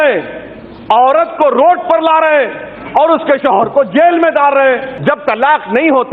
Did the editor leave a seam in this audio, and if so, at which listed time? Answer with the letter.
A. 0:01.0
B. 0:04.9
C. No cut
B